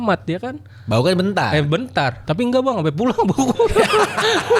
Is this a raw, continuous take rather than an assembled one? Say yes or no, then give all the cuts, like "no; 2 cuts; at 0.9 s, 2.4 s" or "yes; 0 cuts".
yes; 0 cuts